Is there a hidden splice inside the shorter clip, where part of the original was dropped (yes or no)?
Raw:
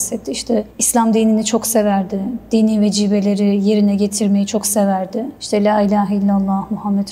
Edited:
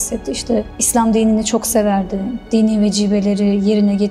no